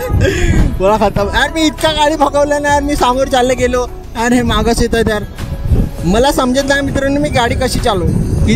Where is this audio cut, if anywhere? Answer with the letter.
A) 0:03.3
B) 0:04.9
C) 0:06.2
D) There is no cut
D